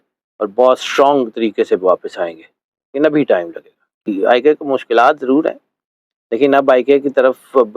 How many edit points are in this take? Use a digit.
1